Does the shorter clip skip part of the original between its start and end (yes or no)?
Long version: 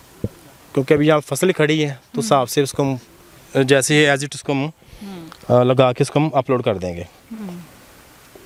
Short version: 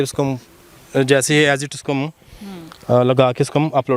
no